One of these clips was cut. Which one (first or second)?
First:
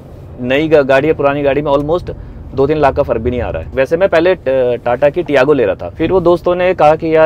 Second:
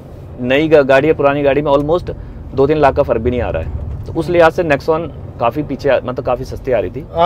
first